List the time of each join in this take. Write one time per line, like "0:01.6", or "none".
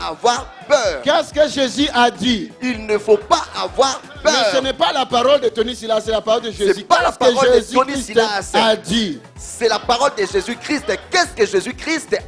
none